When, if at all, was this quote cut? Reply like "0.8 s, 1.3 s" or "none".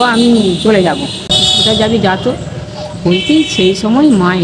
1.4 s